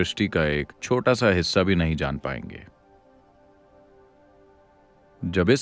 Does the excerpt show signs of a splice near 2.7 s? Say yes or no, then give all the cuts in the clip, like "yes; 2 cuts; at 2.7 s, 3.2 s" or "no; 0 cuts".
no; 0 cuts